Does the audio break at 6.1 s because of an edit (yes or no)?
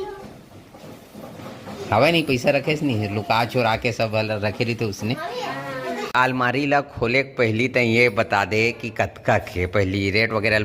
yes